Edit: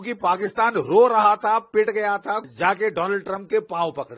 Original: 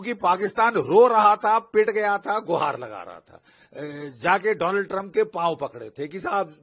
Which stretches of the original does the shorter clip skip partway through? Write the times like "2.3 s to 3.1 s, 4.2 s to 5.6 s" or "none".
2.4 s to 4.1 s